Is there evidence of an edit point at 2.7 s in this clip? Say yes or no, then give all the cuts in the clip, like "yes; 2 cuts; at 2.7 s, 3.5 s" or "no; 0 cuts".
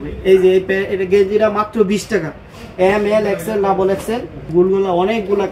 no; 1 cut; at 4.3 s